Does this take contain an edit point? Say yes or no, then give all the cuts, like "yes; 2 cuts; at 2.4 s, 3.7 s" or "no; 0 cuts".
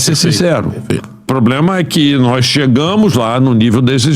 yes; 1 cut; at 1.3 s